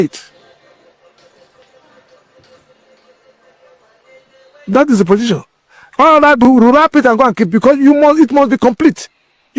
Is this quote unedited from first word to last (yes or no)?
no